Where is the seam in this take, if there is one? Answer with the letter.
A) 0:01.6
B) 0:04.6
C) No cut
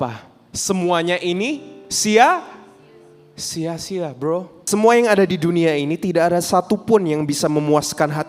B